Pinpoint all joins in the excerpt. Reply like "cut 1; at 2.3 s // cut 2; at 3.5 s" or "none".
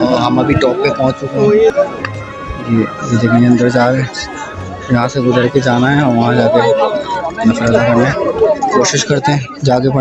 cut 1; at 1.7 s